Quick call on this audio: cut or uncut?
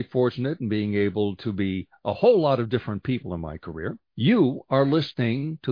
cut